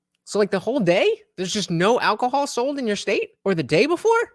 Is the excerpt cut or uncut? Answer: cut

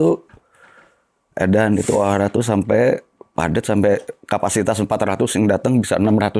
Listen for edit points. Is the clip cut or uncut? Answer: uncut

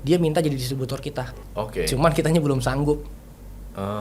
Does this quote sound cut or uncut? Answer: uncut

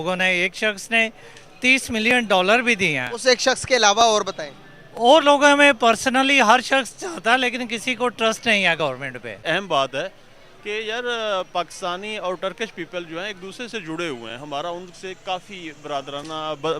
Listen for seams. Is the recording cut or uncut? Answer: cut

